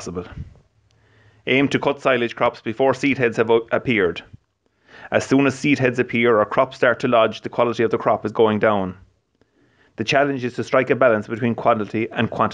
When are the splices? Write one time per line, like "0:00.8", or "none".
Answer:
0:05.4